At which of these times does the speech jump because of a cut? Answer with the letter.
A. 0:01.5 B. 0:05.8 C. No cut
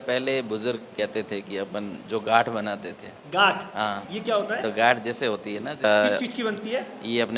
B